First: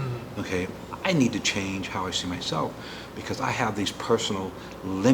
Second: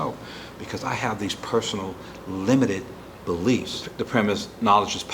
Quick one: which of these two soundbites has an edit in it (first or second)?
second